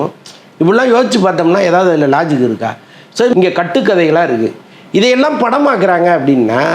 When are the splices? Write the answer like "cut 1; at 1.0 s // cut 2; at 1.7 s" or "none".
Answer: cut 1; at 3.3 s